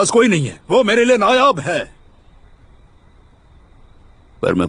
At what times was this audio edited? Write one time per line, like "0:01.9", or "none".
0:02.4

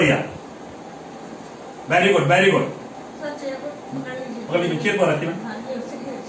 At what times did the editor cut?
none

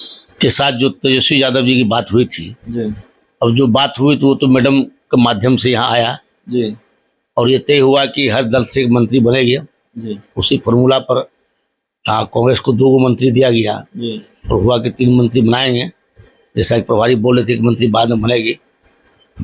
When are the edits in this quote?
none

